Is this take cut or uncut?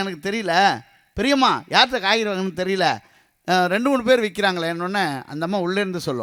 uncut